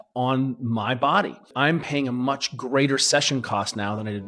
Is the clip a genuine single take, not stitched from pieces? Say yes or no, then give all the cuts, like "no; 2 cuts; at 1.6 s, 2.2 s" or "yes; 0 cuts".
no; 1 cut; at 1.5 s